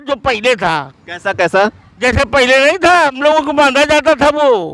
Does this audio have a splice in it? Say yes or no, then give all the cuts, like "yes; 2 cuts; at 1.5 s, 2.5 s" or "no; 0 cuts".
no; 0 cuts